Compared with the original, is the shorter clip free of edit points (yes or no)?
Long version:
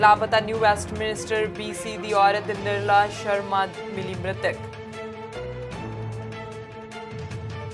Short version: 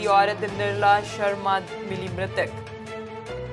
yes